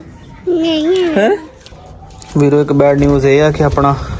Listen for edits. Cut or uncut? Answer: cut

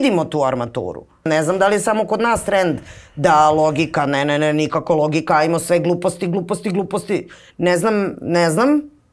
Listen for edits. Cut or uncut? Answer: cut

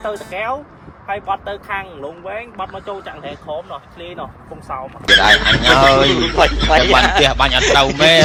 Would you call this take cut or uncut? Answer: uncut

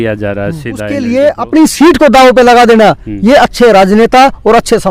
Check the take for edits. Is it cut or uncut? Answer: cut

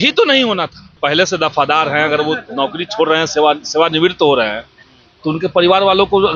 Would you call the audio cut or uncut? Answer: cut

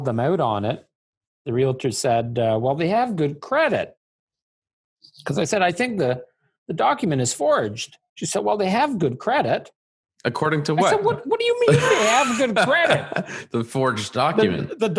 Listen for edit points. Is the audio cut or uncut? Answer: uncut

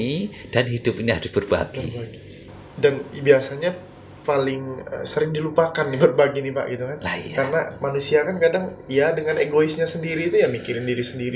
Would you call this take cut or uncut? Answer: uncut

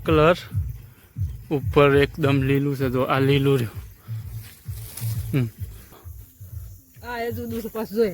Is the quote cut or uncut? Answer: cut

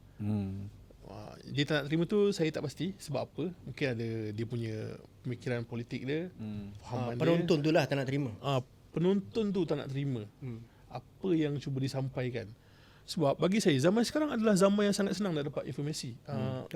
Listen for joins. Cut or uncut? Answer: uncut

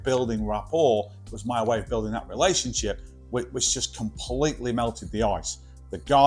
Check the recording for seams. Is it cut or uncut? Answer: uncut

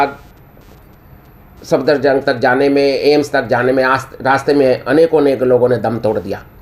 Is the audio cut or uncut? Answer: uncut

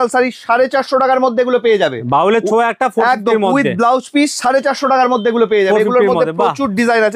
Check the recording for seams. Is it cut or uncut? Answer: uncut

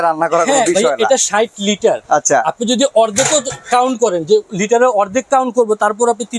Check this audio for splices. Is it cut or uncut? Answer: uncut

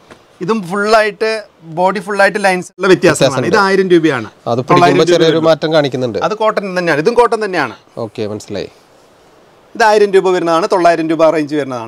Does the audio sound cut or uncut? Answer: cut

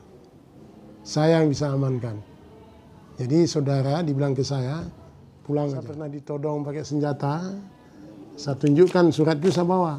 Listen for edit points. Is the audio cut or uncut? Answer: cut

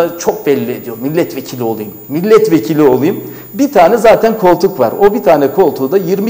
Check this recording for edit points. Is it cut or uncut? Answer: uncut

